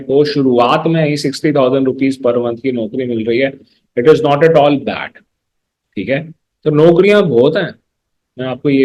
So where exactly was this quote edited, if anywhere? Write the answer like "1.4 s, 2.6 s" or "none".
none